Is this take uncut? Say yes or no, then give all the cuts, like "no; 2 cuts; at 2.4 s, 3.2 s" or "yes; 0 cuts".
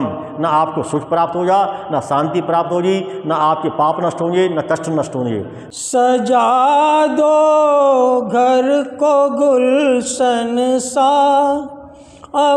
no; 1 cut; at 5.6 s